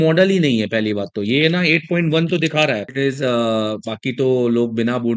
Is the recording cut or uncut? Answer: cut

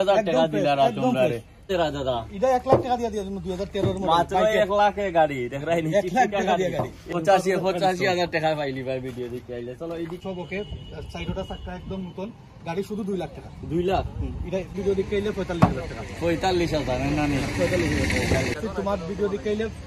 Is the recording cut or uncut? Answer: cut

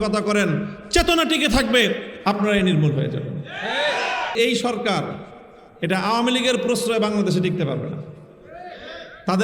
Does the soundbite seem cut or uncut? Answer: cut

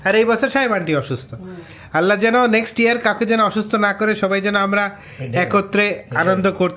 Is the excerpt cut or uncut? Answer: uncut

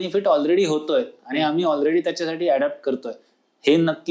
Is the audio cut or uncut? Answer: uncut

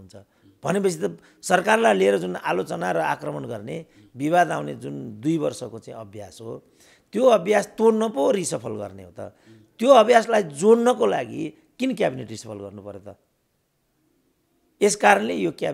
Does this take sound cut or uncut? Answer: uncut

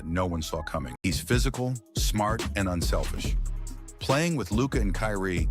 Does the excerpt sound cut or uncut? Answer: cut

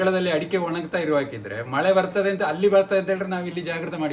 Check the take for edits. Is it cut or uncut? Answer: uncut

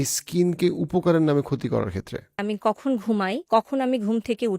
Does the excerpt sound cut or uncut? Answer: cut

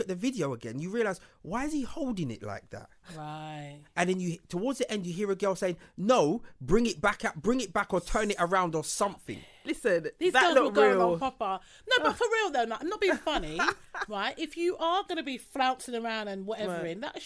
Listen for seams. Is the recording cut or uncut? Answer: uncut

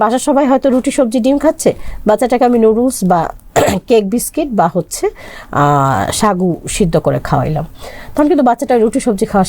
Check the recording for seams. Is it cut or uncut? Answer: uncut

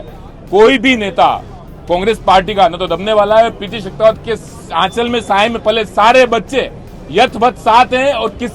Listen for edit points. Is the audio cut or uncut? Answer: uncut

